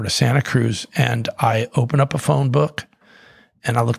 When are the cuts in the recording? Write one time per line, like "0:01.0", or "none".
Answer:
none